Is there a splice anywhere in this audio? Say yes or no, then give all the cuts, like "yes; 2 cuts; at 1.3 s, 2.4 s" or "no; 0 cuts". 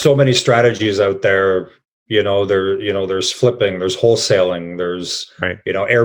no; 0 cuts